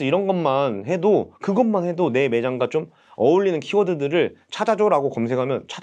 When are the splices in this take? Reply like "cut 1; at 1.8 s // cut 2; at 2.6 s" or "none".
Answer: none